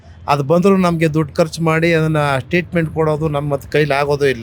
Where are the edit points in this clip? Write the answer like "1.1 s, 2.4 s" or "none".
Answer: none